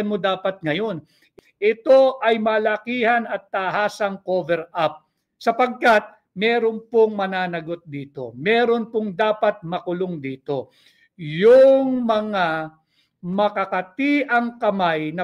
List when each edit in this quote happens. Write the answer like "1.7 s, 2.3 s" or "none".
1.2 s